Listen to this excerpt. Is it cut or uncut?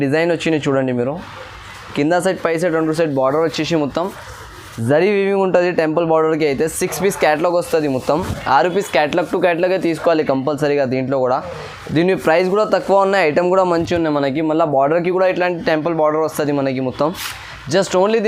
uncut